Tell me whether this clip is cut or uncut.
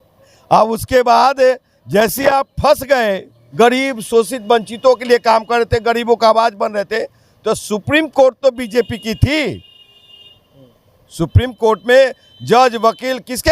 cut